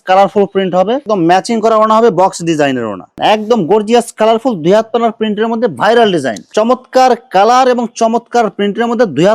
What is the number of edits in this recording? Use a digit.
3